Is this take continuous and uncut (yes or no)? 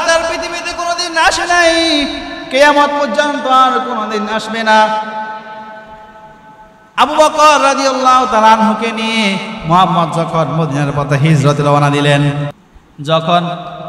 no